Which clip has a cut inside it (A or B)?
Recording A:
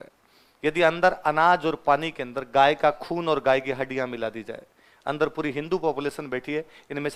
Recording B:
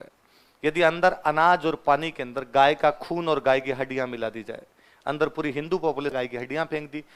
B